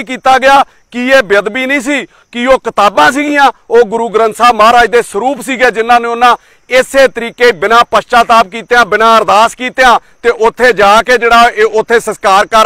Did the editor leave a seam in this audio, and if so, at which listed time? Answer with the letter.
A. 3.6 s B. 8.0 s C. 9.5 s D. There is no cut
D